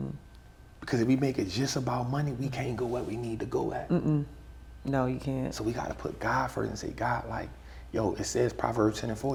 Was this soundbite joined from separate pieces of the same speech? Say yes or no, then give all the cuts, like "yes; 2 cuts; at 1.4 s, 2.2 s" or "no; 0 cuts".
no; 0 cuts